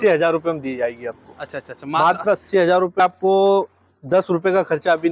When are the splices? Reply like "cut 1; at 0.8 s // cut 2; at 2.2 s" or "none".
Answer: cut 1; at 3.0 s